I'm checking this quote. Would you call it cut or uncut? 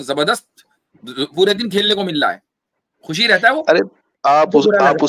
cut